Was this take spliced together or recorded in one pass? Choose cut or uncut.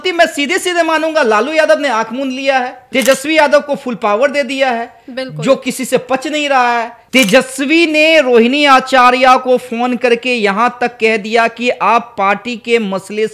cut